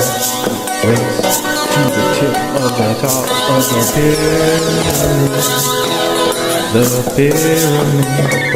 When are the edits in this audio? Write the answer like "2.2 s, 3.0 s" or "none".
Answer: none

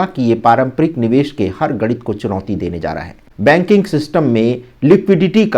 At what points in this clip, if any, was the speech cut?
3.3 s

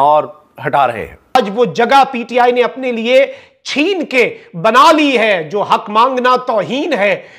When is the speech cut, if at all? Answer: 1.4 s

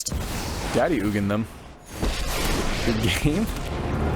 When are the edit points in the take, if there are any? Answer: none

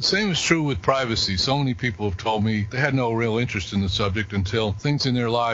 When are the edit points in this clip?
2.7 s, 4.8 s

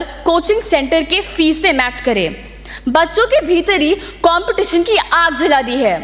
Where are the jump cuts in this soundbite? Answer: none

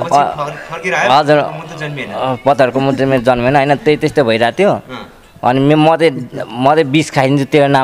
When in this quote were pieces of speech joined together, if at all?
none

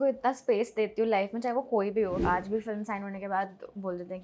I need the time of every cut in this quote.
2.2 s

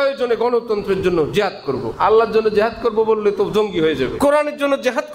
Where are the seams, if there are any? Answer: 1.9 s, 4.1 s

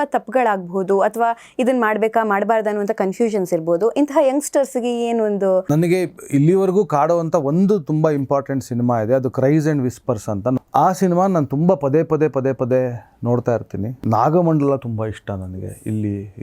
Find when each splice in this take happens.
5.7 s, 10.6 s, 13.9 s

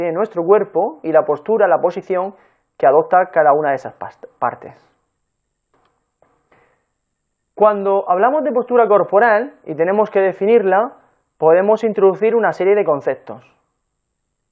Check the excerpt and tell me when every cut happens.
none

